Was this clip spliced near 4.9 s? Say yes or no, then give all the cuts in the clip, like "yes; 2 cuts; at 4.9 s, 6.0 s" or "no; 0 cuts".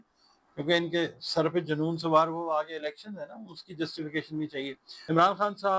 yes; 1 cut; at 4.9 s